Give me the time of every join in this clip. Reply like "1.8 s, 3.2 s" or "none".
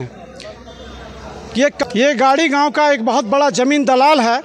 1.8 s